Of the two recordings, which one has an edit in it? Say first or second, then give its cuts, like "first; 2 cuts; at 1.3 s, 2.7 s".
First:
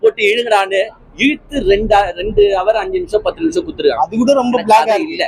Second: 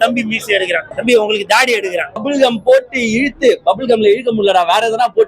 second; 2 cuts; at 0.9 s, 2.2 s